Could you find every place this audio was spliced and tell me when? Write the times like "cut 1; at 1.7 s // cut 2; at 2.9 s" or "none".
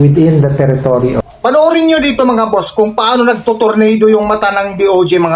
cut 1; at 1.3 s